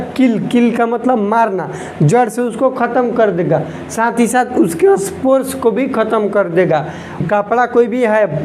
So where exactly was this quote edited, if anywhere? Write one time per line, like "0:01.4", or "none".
0:07.2